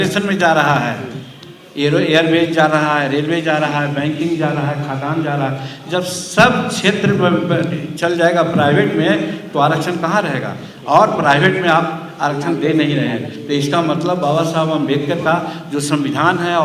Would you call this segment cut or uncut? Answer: uncut